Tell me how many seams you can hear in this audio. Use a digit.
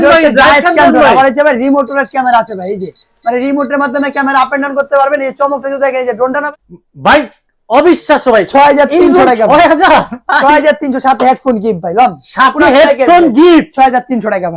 1